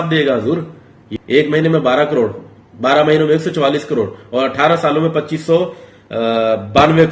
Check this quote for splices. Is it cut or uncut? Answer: cut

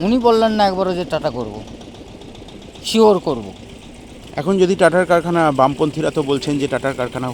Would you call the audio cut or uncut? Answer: uncut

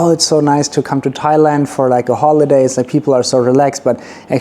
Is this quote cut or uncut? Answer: uncut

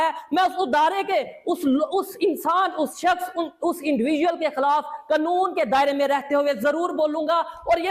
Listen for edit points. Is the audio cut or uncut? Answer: uncut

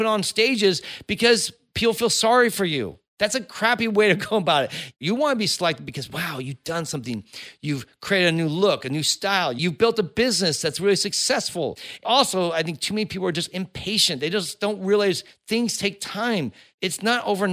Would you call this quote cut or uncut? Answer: cut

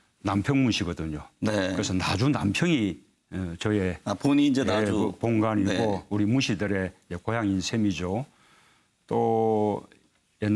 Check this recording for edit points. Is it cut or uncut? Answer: uncut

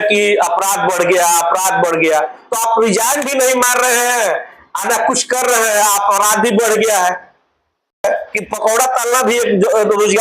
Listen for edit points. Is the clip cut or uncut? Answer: cut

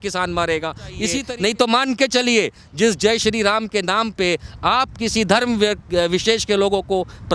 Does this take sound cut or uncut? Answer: cut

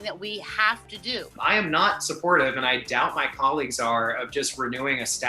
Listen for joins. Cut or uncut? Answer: cut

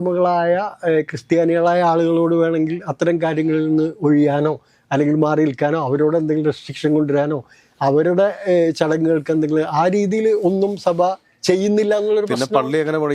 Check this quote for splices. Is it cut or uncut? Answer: uncut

